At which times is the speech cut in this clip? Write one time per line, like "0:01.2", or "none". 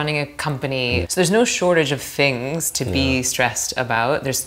0:01.1